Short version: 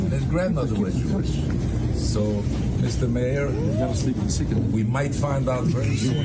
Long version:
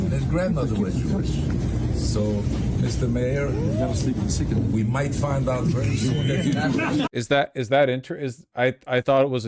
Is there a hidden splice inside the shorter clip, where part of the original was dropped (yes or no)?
no